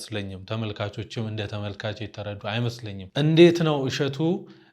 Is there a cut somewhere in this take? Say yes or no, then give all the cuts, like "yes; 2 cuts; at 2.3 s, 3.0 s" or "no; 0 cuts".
yes; 1 cut; at 3.0 s